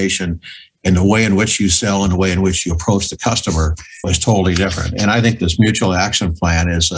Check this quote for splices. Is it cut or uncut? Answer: cut